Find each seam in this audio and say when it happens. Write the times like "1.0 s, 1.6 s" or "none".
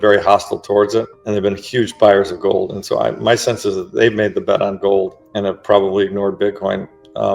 1.2 s, 5.2 s

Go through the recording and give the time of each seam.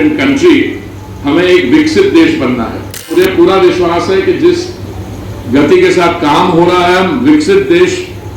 3.1 s

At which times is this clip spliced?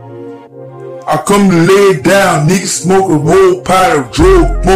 1.0 s

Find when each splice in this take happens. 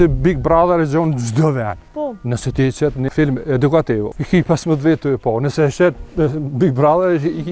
1.8 s, 3.1 s, 4.1 s

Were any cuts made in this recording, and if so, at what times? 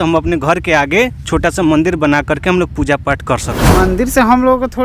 3.6 s

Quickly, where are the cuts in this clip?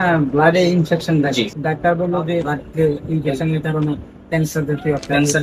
1.6 s, 2.5 s

